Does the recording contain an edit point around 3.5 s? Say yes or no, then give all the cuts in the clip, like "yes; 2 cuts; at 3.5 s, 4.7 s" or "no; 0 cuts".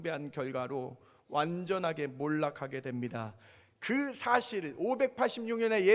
no; 0 cuts